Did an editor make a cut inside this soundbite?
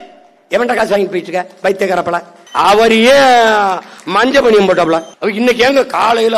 yes; 2 cuts; at 2.4 s, 5.1 s

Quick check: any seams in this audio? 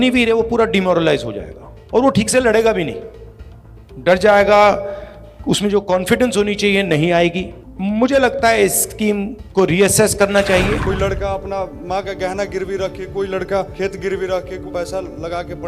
yes; 3 cuts; at 10.8 s, 13.7 s, 14.7 s

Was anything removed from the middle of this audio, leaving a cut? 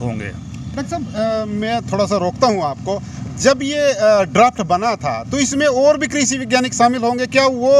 no; 0 cuts

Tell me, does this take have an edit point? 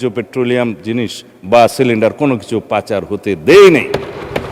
no; 0 cuts

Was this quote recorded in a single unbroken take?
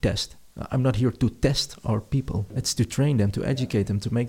no; 1 cut; at 2.7 s

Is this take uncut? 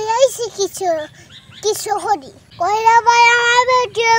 no; 1 cut; at 2.4 s

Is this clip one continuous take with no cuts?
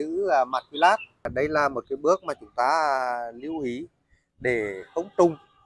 no; 1 cut; at 1.2 s

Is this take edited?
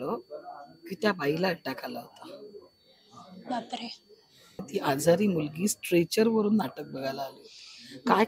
yes; 1 cut; at 4.7 s

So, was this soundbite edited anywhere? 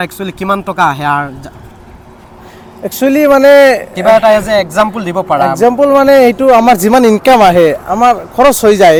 no; 0 cuts

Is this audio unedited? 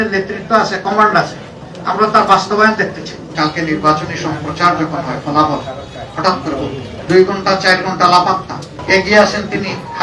no; 2 cuts; at 3.3 s, 6.9 s

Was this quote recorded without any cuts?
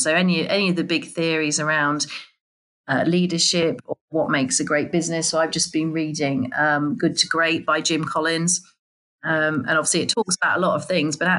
yes; 0 cuts

